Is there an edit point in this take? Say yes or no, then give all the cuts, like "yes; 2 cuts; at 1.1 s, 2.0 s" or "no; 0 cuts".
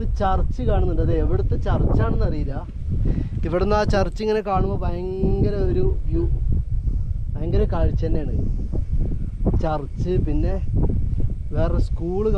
no; 0 cuts